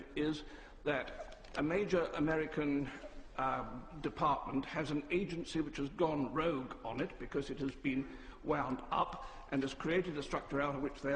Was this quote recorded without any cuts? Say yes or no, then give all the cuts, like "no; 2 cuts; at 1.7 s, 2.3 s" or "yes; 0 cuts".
no; 1 cut; at 7.2 s